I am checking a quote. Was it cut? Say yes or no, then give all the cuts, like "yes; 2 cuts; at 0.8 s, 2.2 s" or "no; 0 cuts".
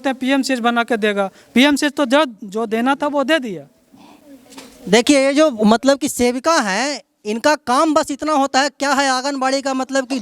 no; 0 cuts